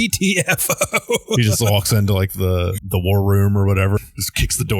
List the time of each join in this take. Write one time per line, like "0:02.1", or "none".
0:02.8
0:04.0

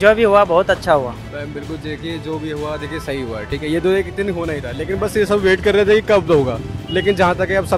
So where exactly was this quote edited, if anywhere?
none

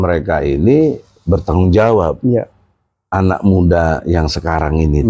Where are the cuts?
none

